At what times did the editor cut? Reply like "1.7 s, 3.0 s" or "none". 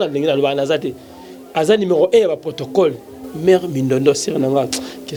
none